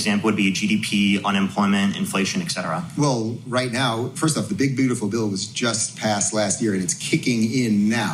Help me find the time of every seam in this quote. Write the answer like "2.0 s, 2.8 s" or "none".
none